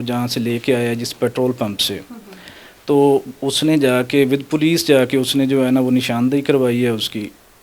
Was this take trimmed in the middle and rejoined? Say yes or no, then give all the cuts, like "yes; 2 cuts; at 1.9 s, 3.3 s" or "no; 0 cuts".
no; 0 cuts